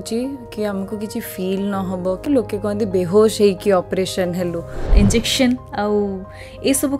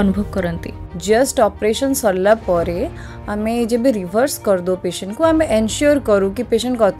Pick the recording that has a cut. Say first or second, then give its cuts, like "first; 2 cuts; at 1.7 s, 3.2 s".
first; 2 cuts; at 2.2 s, 4.8 s